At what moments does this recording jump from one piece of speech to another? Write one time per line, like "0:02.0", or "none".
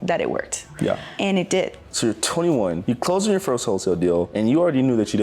0:01.1
0:01.8
0:02.8
0:04.3